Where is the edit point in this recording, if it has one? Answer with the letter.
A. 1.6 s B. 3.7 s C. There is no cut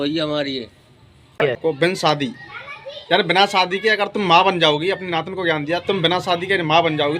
A